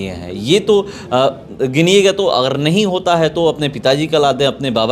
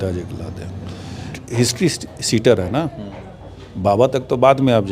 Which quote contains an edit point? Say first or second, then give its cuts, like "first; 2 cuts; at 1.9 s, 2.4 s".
second; 1 cut; at 1.3 s